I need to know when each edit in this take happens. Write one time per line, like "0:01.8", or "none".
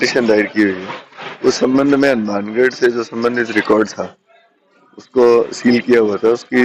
none